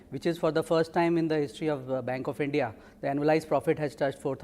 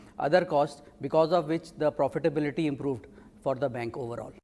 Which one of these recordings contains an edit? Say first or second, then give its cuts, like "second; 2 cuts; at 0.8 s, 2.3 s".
first; 1 cut; at 1.3 s